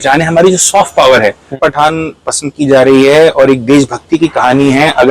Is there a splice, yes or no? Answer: yes